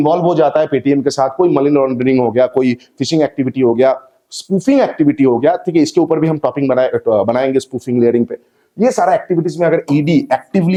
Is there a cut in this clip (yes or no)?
no